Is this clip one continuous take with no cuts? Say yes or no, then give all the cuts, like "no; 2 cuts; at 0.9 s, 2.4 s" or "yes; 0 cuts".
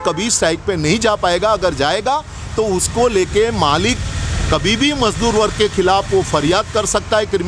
yes; 0 cuts